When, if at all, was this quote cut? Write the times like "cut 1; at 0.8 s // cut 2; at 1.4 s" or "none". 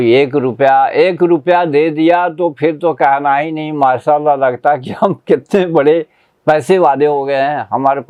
none